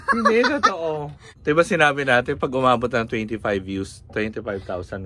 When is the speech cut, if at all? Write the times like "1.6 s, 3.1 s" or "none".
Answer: 1.2 s